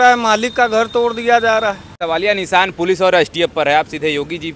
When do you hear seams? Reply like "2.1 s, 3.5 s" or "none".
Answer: 1.9 s